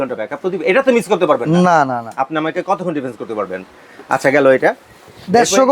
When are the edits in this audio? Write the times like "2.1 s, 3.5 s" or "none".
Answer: none